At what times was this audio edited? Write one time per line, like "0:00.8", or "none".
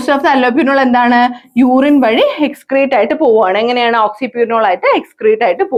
none